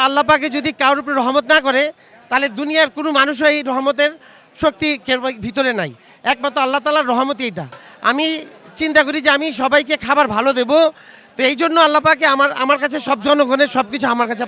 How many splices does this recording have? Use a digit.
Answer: 0